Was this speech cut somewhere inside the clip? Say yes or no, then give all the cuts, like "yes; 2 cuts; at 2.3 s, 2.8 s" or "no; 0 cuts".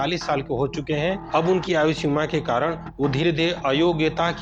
no; 0 cuts